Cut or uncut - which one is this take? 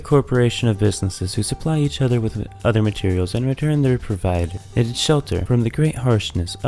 cut